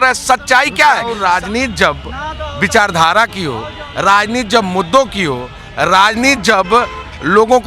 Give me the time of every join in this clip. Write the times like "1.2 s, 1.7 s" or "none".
1.2 s